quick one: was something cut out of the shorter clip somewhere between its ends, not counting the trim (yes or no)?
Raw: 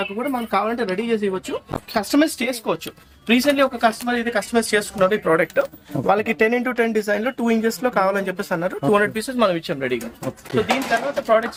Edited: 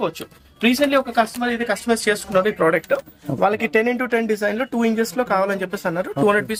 no